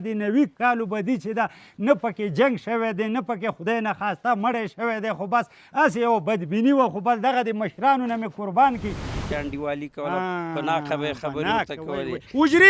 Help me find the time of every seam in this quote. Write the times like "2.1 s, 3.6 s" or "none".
9.2 s